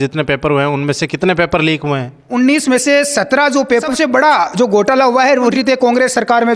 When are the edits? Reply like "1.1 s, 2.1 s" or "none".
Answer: 2.3 s, 3.9 s, 5.5 s